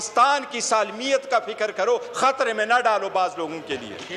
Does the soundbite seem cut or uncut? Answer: uncut